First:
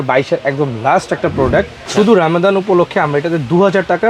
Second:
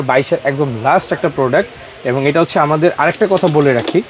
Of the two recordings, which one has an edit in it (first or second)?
first